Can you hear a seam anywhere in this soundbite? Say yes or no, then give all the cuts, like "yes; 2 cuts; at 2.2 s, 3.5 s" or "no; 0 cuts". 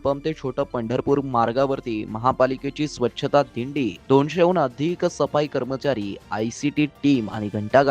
no; 0 cuts